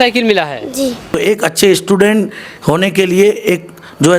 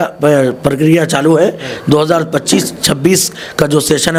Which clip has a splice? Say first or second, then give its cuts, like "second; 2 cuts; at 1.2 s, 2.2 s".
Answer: first; 1 cut; at 1.1 s